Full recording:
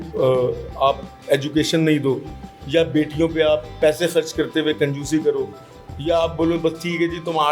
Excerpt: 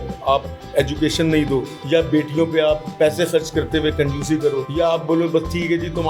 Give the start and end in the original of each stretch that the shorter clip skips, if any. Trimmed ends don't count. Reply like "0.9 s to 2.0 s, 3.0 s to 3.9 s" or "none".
2.3 s to 2.6 s, 5.5 s to 6.0 s